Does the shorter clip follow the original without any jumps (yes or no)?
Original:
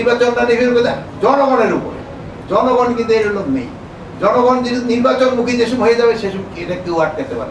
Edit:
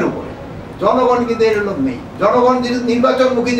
no